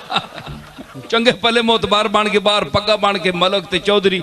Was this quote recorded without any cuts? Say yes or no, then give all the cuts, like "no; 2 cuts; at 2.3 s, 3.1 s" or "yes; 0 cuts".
no; 1 cut; at 0.9 s